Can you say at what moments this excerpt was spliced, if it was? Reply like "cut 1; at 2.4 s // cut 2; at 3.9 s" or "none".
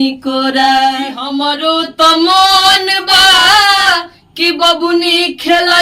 cut 1; at 1.4 s